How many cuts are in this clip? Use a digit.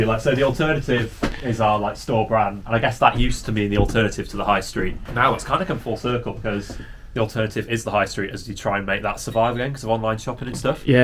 2